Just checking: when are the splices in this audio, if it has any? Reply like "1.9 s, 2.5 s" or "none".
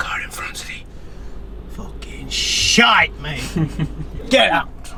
none